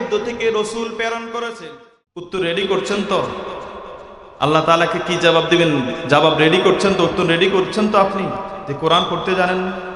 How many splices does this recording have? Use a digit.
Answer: 1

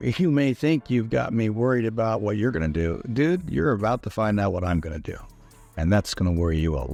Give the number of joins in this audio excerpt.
0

